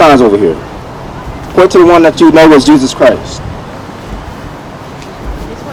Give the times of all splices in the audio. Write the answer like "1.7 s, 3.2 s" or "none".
none